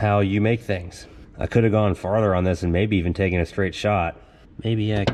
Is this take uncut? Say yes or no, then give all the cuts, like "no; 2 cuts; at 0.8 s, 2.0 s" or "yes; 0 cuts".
yes; 0 cuts